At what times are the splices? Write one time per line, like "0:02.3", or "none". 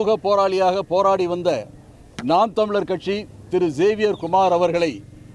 none